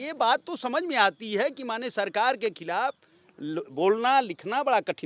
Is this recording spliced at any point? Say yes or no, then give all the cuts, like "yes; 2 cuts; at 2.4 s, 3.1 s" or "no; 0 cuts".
no; 0 cuts